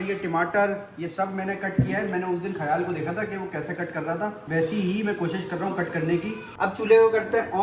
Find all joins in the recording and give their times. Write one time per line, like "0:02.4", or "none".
0:06.5